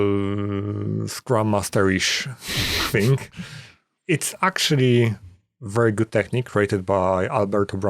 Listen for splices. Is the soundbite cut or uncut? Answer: uncut